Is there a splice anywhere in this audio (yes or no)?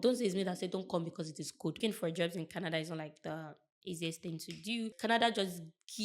yes